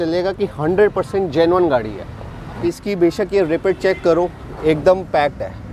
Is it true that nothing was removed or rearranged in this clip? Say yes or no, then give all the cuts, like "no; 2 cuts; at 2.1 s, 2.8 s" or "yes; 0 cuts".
no; 1 cut; at 2.6 s